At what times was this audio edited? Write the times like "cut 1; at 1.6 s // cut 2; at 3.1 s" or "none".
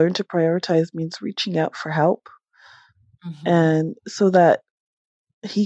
none